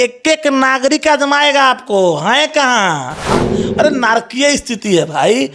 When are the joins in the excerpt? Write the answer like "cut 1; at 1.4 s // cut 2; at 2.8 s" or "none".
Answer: cut 1; at 3.3 s